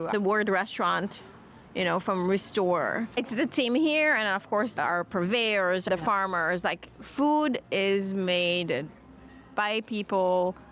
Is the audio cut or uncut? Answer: cut